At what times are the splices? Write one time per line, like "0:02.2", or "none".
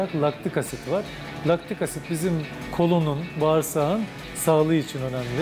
none